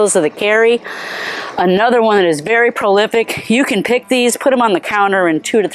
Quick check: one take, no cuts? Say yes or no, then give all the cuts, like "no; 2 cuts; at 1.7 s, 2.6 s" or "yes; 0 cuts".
yes; 0 cuts